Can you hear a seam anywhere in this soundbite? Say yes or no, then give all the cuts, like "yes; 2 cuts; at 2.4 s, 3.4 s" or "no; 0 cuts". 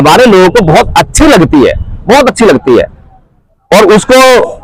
no; 0 cuts